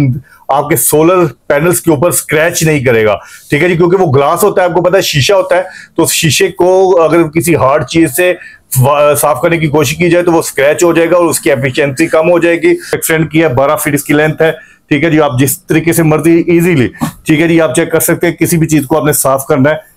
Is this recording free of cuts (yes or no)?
no